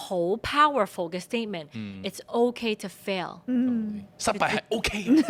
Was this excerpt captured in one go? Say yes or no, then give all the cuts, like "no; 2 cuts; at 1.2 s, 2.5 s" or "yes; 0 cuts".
yes; 0 cuts